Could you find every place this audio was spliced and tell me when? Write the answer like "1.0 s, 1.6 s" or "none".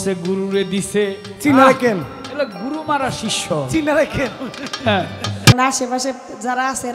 5.5 s